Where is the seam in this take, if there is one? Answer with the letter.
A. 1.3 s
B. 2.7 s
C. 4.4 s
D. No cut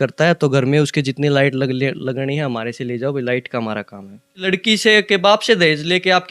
C